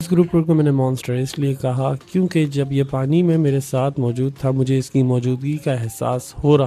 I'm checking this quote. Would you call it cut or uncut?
uncut